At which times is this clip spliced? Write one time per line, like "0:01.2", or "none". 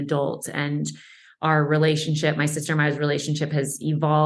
none